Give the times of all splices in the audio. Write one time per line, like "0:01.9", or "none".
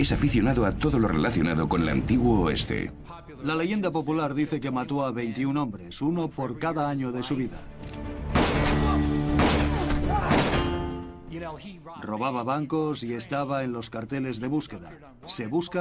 none